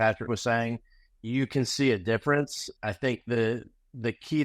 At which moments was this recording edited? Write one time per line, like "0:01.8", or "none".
0:02.6